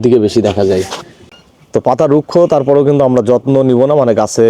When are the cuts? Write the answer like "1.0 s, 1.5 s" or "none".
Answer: 1.2 s